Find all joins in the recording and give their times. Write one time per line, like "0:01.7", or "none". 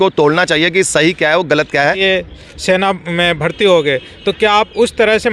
0:02.0